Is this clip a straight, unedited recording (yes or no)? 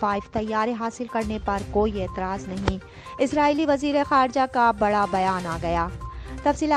yes